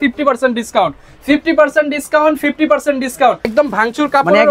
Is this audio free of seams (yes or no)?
no